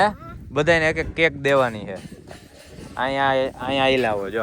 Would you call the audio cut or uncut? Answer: uncut